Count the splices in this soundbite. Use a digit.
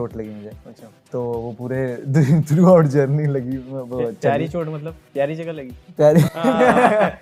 0